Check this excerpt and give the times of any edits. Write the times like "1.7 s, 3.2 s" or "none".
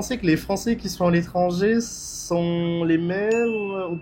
none